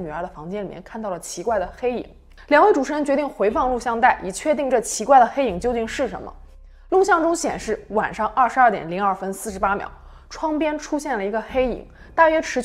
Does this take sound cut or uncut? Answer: uncut